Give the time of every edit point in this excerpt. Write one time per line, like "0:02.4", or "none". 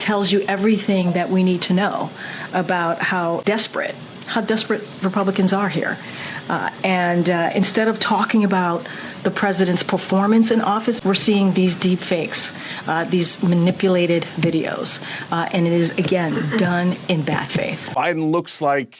0:03.4
0:11.0
0:17.9